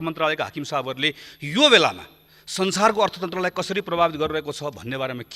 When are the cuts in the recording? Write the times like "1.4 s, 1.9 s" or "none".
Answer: none